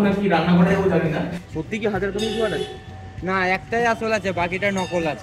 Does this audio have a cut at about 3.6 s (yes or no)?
no